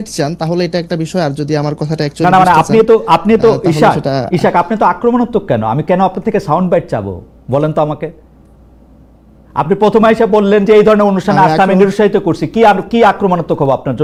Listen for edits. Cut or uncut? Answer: uncut